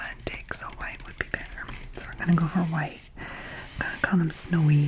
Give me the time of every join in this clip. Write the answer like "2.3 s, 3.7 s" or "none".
none

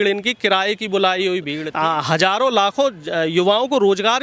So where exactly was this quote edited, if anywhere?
1.6 s

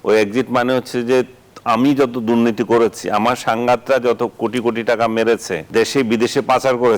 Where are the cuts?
5.6 s

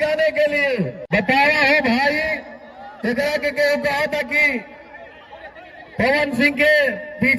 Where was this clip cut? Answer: 1.0 s

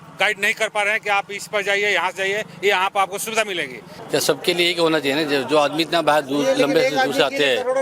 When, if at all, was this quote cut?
3.9 s

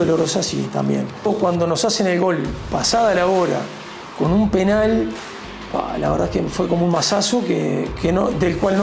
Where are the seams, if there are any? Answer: 1.3 s

